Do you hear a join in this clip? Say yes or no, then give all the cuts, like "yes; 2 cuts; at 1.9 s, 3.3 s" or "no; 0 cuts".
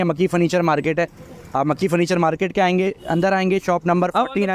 no; 0 cuts